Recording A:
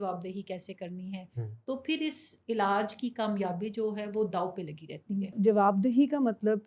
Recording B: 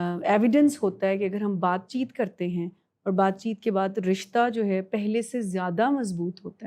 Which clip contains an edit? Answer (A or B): A